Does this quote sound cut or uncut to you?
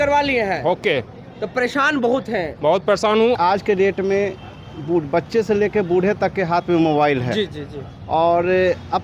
cut